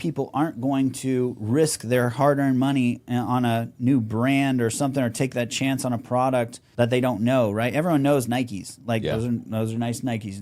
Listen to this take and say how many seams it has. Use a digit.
1